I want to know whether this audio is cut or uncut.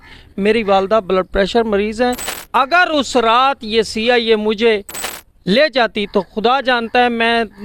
uncut